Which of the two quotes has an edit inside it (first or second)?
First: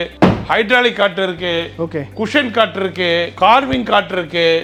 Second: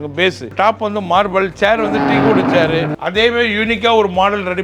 second